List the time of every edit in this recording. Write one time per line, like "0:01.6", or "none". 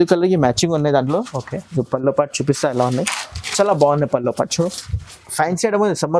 0:05.2